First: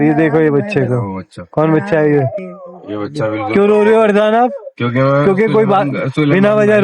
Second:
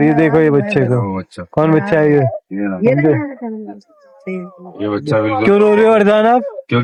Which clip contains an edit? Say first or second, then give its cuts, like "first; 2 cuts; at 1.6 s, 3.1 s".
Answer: first; 1 cut; at 2.4 s